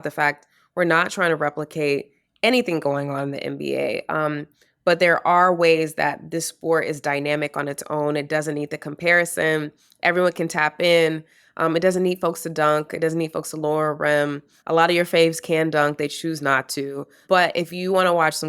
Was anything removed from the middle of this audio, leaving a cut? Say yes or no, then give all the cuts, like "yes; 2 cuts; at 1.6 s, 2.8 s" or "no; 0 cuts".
yes; 2 cuts; at 14.5 s, 17.2 s